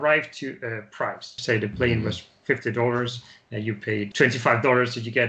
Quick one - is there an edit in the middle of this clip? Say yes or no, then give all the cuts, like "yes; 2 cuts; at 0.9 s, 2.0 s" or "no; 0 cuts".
yes; 2 cuts; at 1.4 s, 4.1 s